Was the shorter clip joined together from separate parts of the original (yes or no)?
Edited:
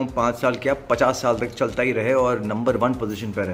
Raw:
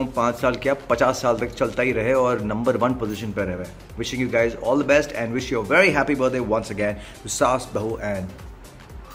no